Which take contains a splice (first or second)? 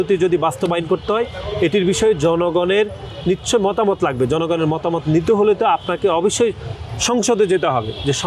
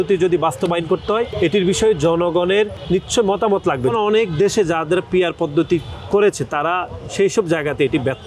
second